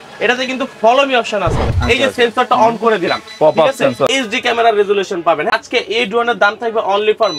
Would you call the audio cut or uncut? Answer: cut